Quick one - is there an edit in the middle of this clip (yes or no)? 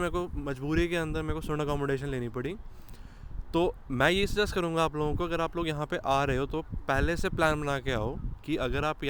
no